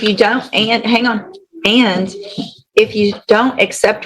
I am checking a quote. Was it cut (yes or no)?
no